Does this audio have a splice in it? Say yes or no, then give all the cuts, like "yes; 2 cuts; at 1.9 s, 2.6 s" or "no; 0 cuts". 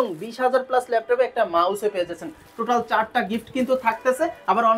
no; 0 cuts